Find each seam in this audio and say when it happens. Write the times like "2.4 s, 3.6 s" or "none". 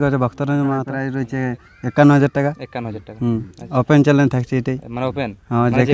1.0 s

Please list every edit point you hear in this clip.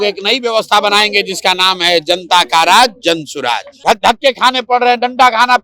3.7 s

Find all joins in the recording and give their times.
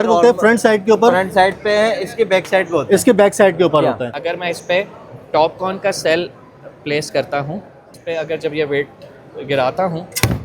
4.2 s, 8.0 s

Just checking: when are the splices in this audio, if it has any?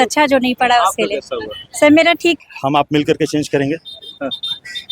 2.4 s

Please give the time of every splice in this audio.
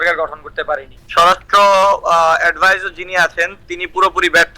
1.0 s

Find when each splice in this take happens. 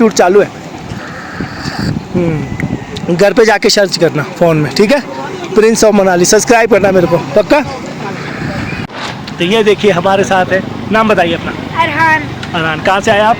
none

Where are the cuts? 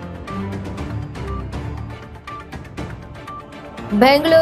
2.7 s

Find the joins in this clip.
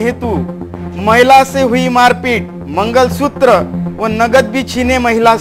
none

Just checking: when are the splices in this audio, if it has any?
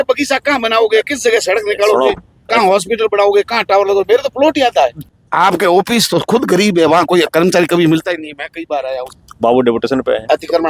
5.0 s, 9.1 s

